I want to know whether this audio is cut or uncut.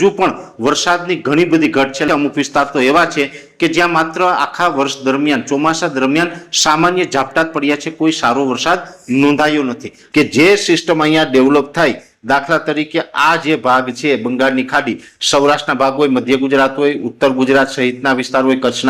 cut